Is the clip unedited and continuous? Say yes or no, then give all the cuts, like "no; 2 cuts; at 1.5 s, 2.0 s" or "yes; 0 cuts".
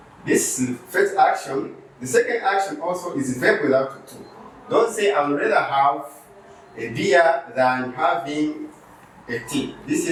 yes; 0 cuts